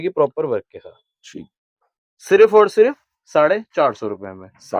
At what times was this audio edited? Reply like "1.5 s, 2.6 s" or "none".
none